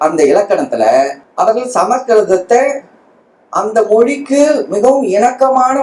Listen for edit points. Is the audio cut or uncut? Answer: cut